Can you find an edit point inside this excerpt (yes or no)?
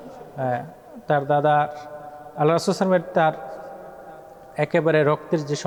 no